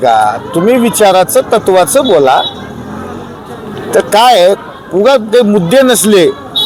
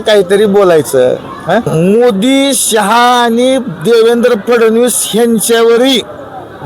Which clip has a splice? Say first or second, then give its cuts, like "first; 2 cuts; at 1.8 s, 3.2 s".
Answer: second; 1 cut; at 1.7 s